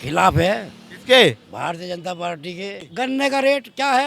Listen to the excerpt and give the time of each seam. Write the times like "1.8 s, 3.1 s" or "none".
2.9 s

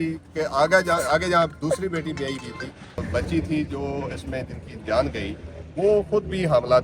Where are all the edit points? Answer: 3.1 s

